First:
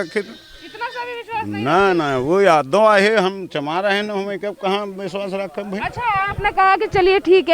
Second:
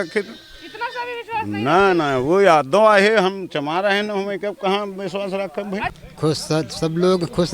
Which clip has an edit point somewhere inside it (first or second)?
second